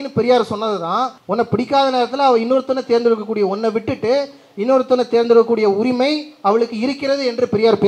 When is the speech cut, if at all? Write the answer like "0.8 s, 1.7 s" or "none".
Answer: 1.2 s